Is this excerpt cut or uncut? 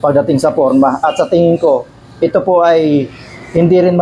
uncut